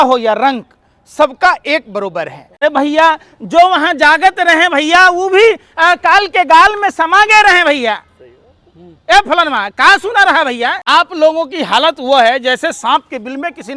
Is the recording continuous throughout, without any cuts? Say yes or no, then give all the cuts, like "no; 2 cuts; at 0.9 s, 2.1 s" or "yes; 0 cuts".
no; 2 cuts; at 2.6 s, 10.8 s